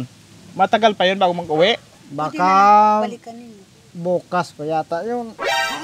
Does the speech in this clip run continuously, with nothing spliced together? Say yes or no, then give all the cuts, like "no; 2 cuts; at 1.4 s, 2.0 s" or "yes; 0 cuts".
no; 1 cut; at 2.0 s